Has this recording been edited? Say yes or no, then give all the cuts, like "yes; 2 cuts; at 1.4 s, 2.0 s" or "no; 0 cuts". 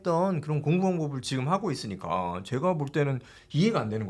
no; 0 cuts